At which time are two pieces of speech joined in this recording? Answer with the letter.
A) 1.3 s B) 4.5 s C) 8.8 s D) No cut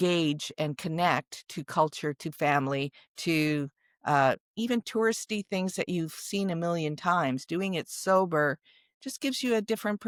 D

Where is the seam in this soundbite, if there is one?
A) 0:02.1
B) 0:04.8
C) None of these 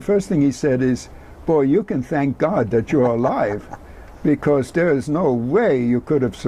C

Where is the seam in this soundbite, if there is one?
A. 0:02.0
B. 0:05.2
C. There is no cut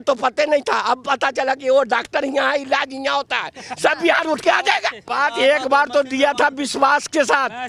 B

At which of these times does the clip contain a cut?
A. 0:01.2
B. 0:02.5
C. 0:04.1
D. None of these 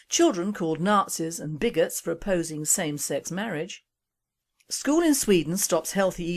B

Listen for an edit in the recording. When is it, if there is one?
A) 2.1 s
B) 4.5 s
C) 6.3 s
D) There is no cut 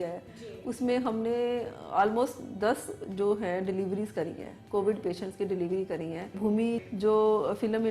C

